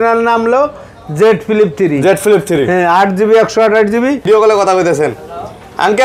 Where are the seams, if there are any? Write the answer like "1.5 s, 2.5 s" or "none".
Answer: 4.2 s